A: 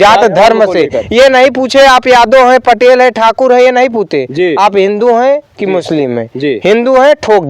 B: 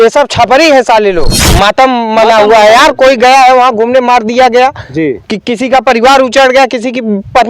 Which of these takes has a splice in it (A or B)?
B